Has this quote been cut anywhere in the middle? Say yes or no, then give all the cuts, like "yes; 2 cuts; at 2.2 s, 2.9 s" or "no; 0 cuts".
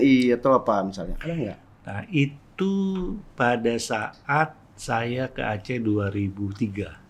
no; 0 cuts